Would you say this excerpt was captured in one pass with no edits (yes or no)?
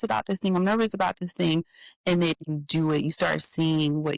yes